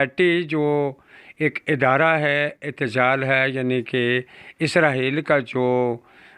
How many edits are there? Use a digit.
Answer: 0